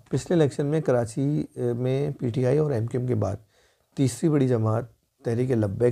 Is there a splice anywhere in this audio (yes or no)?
no